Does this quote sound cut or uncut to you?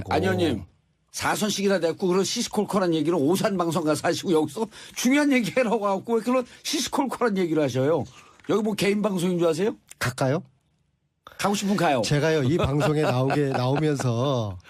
cut